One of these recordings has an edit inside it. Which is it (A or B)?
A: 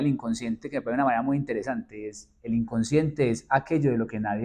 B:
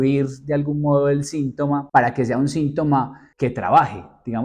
B